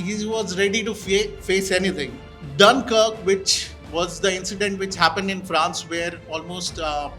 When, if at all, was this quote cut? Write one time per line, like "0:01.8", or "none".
none